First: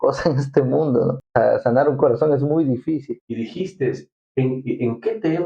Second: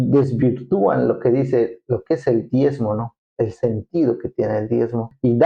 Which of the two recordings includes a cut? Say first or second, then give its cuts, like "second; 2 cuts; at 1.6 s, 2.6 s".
first; 1 cut; at 3.1 s